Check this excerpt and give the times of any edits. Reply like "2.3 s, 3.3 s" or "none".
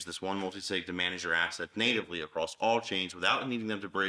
none